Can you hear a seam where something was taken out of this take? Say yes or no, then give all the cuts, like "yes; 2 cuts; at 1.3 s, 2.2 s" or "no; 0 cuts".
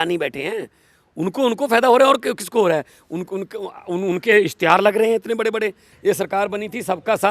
yes; 1 cut; at 5.9 s